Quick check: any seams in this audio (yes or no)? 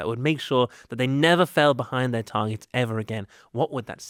no